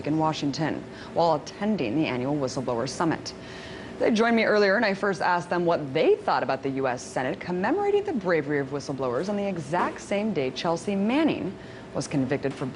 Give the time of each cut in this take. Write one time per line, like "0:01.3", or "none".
0:04.5